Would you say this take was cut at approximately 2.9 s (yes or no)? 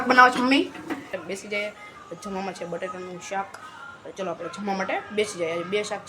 no